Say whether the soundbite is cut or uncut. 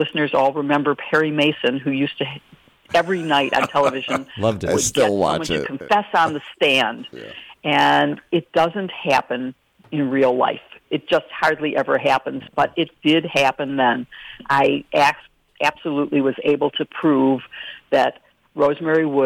uncut